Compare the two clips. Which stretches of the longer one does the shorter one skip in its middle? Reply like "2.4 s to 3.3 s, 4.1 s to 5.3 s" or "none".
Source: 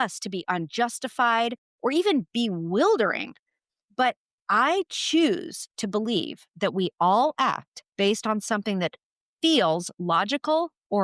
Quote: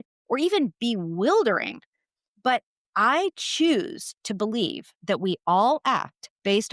none